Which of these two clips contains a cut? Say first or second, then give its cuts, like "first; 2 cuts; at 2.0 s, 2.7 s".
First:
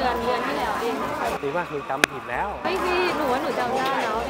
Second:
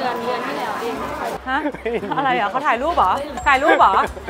second; 2 cuts; at 1.4 s, 3.3 s